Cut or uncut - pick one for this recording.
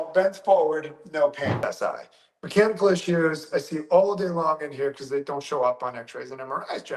cut